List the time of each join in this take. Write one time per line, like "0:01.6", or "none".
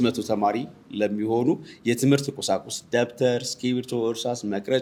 none